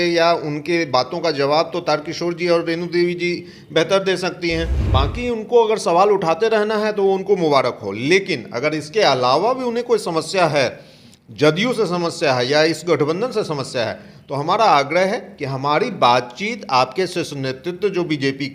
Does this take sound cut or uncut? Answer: cut